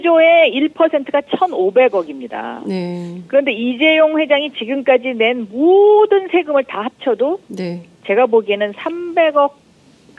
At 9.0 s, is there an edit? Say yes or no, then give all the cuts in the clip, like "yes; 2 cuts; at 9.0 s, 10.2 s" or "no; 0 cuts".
yes; 1 cut; at 9.0 s